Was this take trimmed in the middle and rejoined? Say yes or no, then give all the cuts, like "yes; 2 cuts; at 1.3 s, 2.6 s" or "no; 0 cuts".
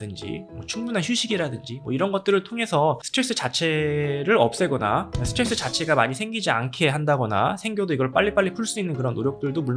no; 0 cuts